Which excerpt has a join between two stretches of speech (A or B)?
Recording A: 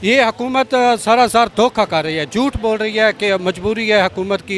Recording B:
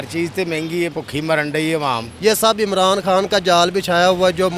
B